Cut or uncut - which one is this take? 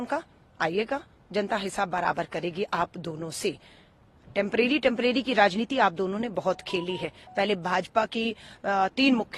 uncut